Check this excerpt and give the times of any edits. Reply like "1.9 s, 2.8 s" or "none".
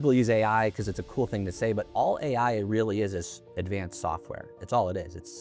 none